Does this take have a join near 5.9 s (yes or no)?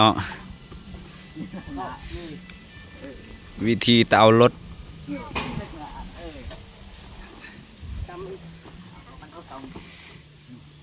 no